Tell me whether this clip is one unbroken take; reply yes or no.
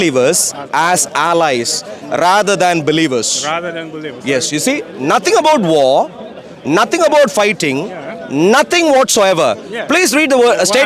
yes